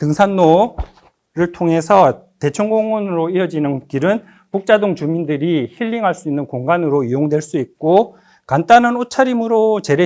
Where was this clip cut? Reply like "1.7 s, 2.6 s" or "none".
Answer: none